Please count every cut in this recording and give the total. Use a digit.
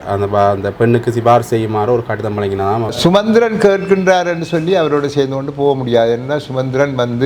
1